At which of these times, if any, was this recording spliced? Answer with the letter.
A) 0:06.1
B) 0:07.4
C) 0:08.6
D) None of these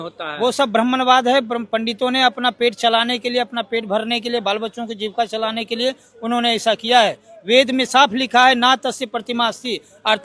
D